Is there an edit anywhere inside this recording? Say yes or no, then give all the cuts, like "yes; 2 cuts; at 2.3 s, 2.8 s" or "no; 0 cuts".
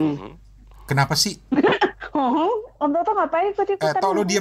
no; 0 cuts